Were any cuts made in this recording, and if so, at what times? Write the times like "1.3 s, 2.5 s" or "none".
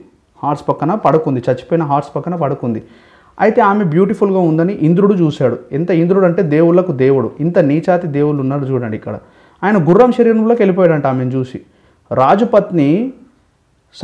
none